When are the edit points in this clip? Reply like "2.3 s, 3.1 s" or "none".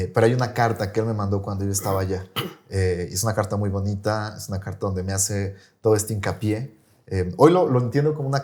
none

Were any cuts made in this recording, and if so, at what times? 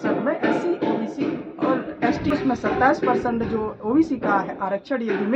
2.3 s

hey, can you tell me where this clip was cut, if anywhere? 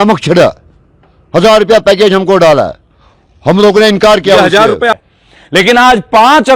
5.0 s

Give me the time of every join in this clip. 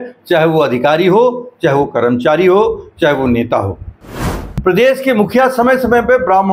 4.1 s

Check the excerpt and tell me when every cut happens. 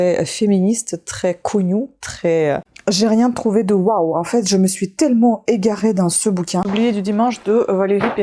2.7 s, 6.7 s

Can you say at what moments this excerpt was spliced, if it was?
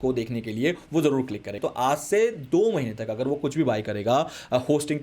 1.5 s

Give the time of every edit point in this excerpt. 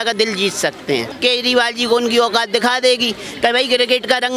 1.1 s

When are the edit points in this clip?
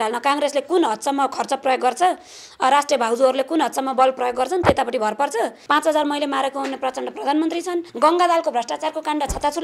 5.6 s, 7.9 s

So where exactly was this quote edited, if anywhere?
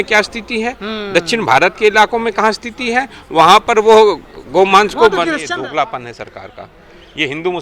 5.4 s

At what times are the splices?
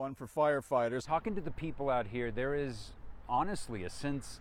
1.0 s

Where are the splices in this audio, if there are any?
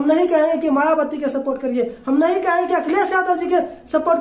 none

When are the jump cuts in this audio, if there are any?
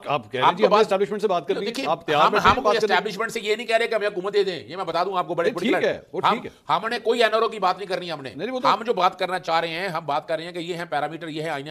none

